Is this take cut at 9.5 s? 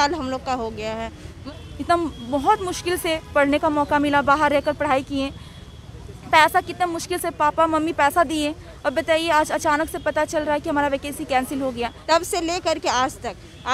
no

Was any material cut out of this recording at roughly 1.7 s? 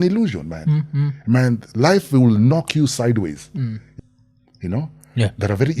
no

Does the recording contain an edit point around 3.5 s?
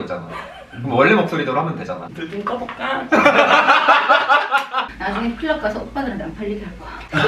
no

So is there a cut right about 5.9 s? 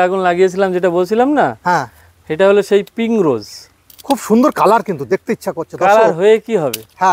no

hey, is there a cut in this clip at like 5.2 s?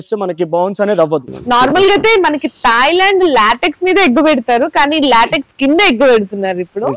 no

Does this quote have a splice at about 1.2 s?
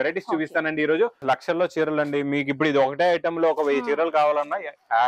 yes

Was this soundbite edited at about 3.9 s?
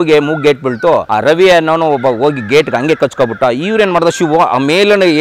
no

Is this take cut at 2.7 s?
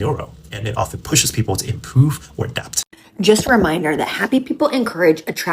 yes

